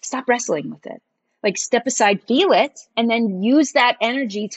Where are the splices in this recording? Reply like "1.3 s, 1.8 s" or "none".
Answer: 2.9 s